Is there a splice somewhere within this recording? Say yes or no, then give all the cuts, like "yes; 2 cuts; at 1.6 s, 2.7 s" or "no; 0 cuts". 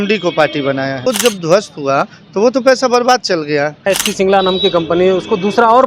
yes; 2 cuts; at 1.1 s, 3.9 s